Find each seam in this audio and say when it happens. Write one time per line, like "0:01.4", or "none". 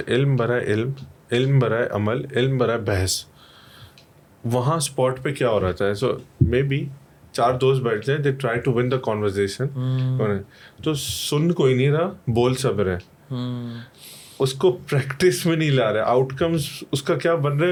none

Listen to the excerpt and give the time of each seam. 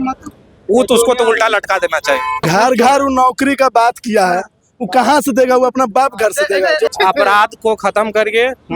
0:02.5
0:06.9

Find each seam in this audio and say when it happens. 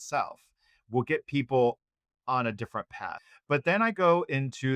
0:03.3

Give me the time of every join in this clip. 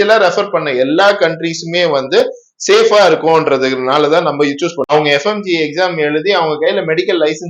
0:04.9

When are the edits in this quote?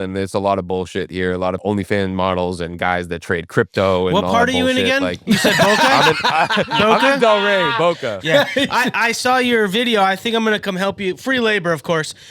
0:01.6

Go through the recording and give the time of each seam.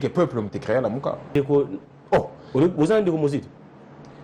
0:01.3

